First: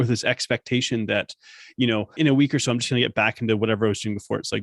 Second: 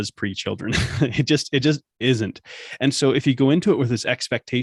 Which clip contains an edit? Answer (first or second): first